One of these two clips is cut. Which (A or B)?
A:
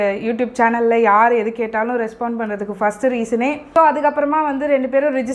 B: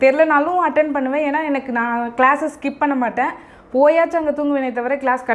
A